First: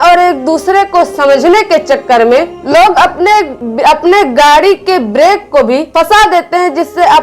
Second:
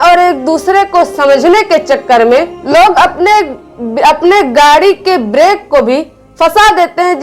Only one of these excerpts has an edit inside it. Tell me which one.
first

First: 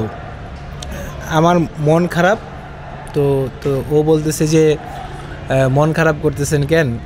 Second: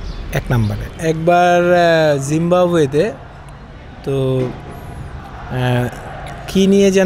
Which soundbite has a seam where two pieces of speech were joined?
second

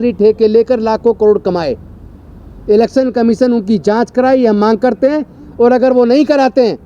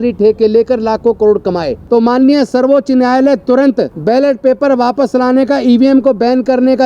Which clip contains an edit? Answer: second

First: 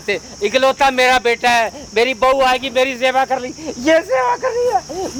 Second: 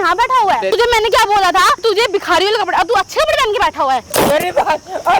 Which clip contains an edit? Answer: second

